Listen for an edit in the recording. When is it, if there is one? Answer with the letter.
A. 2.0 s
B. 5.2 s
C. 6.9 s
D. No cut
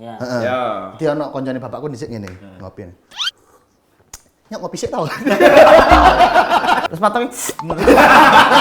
C